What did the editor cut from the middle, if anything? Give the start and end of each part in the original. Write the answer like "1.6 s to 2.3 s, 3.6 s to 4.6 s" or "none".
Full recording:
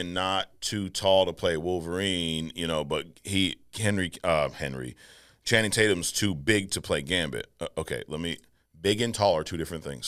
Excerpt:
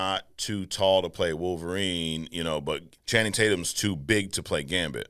3.2 s to 5.3 s